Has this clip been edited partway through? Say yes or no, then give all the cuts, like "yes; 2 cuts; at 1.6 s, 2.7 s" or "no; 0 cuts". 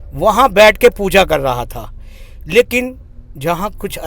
no; 0 cuts